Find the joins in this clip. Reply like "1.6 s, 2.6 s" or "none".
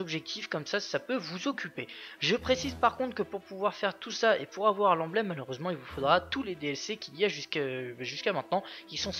none